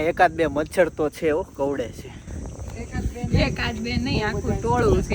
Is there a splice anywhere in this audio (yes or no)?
no